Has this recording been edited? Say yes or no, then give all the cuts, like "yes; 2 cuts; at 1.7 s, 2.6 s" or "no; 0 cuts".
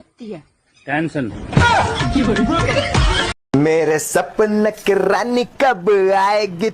yes; 1 cut; at 3.4 s